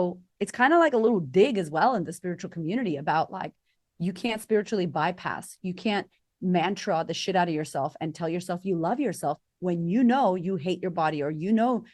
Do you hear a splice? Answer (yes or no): no